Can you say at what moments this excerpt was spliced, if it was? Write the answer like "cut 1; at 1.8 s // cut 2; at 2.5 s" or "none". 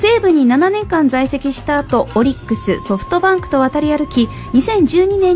cut 1; at 3.2 s